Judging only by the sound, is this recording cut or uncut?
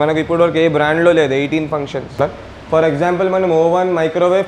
cut